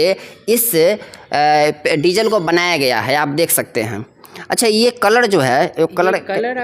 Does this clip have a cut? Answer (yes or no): no